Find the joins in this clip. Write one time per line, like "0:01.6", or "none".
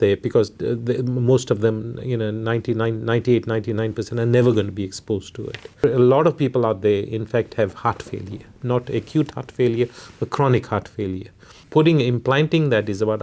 0:05.8
0:11.6